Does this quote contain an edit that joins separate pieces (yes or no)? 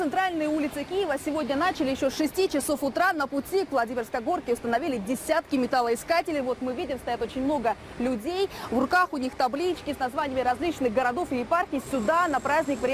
no